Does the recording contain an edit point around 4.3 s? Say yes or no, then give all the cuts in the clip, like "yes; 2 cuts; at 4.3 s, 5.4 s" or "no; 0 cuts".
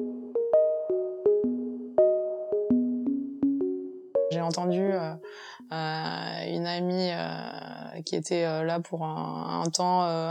yes; 1 cut; at 4.3 s